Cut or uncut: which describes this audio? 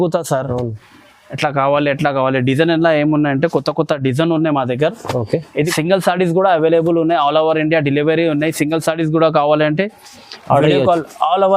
cut